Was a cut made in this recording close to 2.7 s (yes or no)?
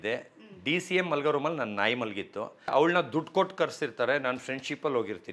yes